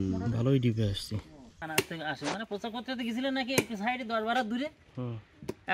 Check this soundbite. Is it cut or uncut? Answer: cut